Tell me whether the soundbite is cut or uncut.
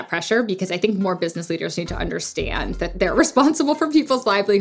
cut